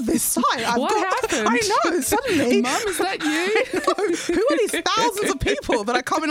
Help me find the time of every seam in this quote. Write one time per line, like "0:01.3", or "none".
none

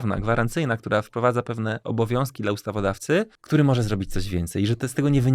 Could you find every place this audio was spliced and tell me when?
0:03.4

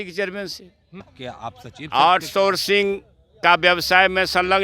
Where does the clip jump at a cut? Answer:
0:01.1

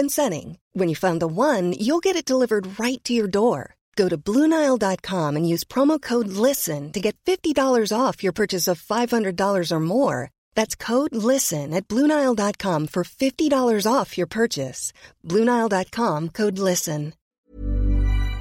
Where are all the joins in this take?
0:17.3

